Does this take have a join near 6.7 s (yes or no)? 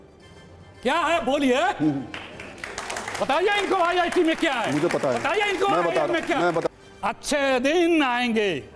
yes